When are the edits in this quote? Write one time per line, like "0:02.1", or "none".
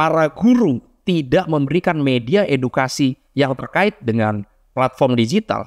none